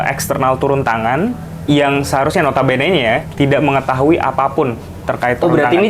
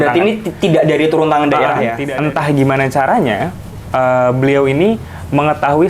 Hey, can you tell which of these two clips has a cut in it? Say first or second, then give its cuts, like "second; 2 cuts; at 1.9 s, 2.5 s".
second; 1 cut; at 2.0 s